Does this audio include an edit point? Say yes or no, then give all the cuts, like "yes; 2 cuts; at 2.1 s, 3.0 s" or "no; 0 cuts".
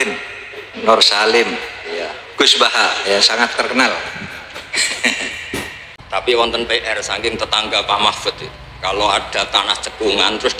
yes; 1 cut; at 5.8 s